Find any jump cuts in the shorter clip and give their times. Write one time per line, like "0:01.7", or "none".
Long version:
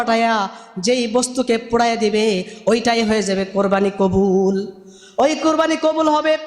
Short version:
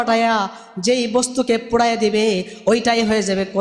none